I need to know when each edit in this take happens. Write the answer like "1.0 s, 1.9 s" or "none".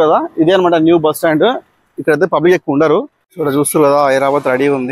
3.2 s